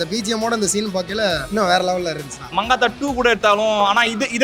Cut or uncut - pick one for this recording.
cut